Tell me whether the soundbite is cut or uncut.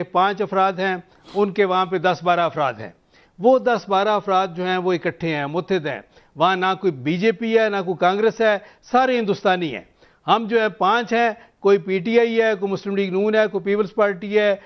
uncut